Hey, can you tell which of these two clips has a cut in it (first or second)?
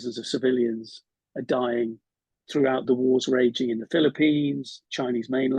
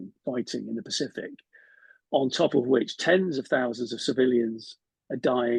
first